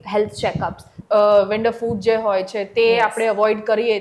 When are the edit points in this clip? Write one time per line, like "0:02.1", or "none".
0:01.0